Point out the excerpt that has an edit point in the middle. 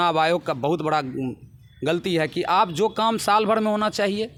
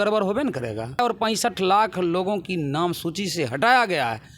second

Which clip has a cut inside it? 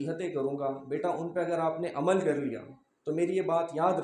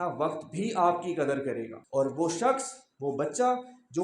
second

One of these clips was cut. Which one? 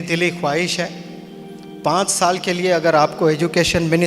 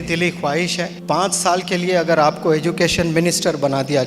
second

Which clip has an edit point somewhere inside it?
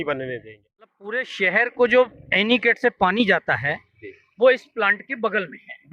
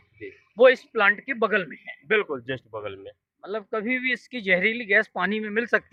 first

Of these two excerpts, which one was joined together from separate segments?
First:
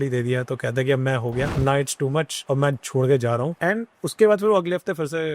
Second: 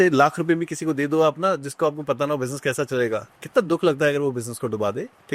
first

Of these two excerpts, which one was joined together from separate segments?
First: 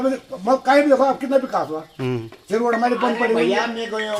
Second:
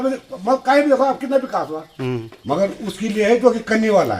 second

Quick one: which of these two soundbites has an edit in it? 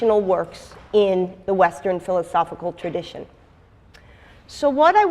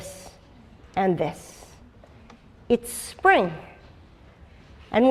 first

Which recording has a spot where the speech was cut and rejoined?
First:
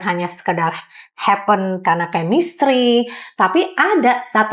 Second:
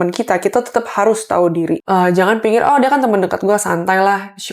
second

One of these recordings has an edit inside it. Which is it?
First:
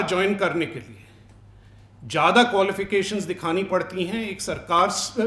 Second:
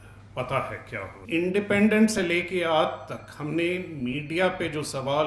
second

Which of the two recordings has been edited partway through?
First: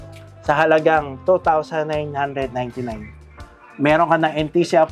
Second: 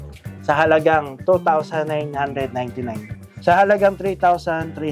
second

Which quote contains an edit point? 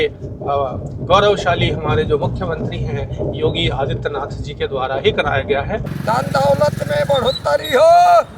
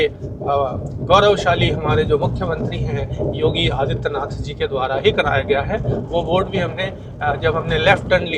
first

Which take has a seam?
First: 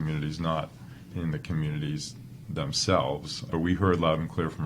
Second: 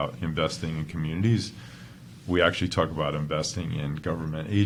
first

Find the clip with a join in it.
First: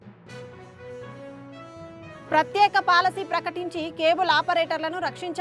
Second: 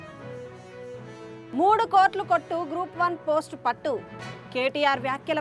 second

